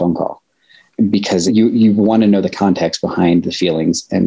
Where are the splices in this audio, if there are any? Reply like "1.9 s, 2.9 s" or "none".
0.9 s